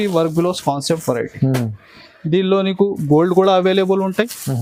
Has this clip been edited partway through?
no; 0 cuts

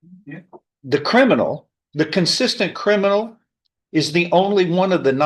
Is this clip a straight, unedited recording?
yes; 0 cuts

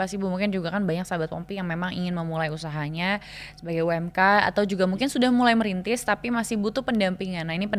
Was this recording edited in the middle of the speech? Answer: no; 0 cuts

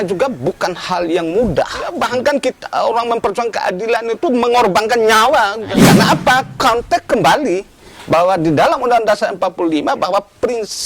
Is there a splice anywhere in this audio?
yes; 2 cuts; at 1.9 s, 5.7 s

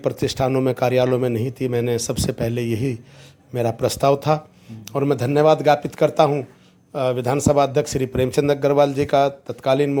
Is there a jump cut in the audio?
no; 0 cuts

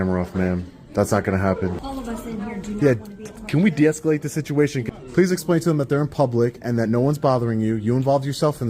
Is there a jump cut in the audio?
yes; 2 cuts; at 1.8 s, 4.8 s

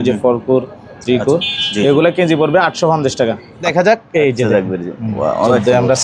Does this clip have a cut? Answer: yes; 1 cut; at 3.5 s

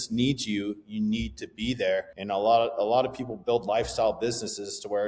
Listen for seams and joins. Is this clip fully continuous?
no; 1 cut; at 2.1 s

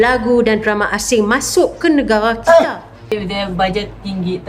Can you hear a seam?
yes; 1 cut; at 3.2 s

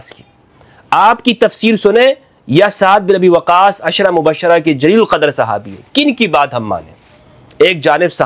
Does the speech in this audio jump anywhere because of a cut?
no; 0 cuts

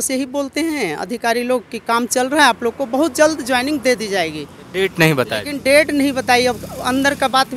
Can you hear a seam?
no; 0 cuts

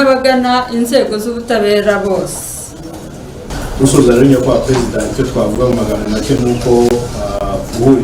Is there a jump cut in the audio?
yes; 1 cut; at 3.5 s

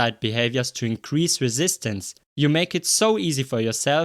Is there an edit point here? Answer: yes; 1 cut; at 2.2 s

